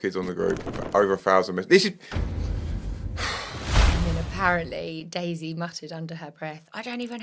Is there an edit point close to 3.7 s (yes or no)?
yes